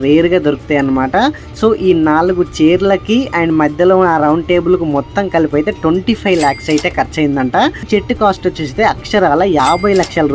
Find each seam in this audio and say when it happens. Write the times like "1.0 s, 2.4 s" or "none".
7.9 s